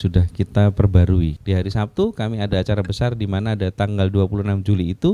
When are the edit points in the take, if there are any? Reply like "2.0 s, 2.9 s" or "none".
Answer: 1.4 s